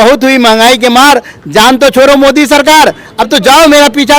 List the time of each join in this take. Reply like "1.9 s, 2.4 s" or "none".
none